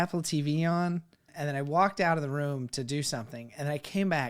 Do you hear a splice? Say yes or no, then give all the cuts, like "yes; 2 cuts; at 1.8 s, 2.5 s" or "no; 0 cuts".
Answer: yes; 1 cut; at 1.3 s